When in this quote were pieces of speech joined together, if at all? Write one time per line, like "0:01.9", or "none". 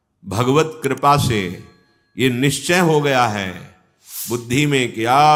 none